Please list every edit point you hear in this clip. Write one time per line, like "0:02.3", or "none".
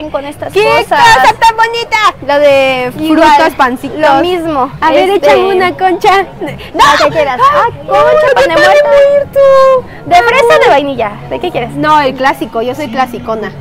none